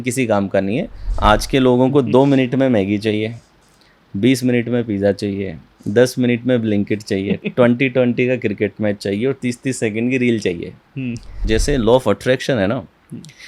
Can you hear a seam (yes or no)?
yes